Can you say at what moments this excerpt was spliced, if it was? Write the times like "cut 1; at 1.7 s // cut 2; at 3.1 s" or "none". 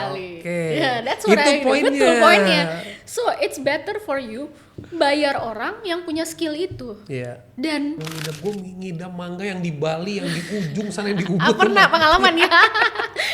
cut 1; at 8.1 s